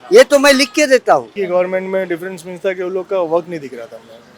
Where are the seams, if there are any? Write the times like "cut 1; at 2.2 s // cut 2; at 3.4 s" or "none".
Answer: cut 1; at 1.3 s